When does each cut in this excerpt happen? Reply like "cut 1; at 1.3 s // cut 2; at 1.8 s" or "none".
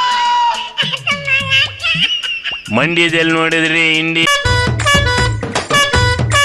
cut 1; at 4.3 s

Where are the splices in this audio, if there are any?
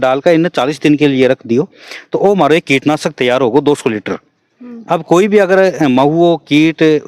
none

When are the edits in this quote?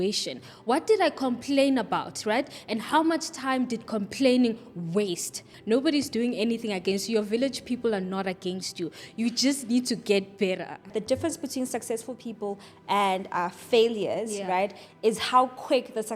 cut 1; at 5.5 s // cut 2; at 10.9 s

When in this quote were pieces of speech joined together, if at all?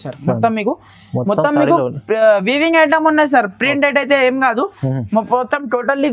none

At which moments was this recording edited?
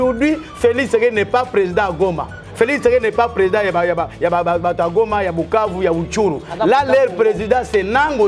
none

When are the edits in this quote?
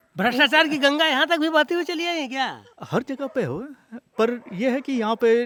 none

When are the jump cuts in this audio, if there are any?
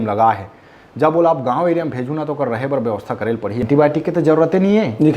cut 1; at 3.6 s

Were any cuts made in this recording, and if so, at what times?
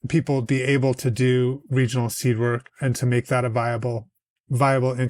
none

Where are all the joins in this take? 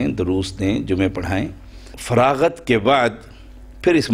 cut 1; at 2.0 s

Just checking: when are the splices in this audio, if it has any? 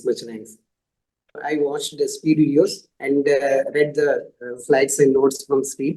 cut 1; at 1.4 s

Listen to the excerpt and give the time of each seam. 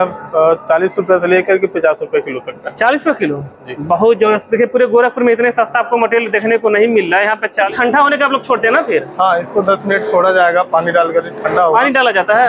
cut 1; at 7.7 s

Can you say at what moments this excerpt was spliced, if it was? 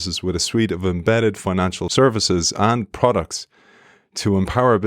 cut 1; at 1.8 s

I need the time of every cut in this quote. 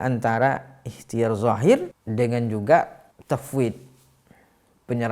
cut 1; at 2.0 s // cut 2; at 3.1 s

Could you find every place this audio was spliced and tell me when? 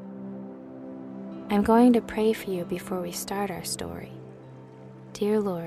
cut 1; at 1.2 s

